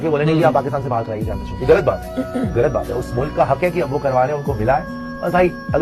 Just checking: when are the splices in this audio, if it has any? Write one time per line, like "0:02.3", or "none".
none